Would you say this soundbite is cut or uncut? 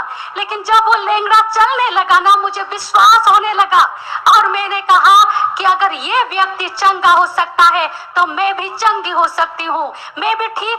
uncut